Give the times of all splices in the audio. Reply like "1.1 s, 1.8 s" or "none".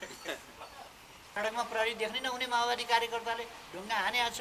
1.2 s